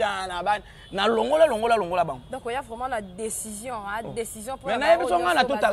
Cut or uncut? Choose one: uncut